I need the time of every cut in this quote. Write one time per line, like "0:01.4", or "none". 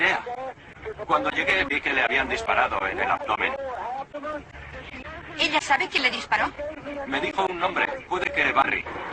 0:02.7